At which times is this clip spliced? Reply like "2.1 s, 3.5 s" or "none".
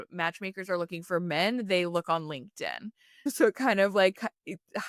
none